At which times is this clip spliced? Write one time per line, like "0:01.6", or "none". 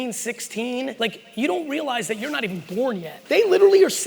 0:00.9
0:03.1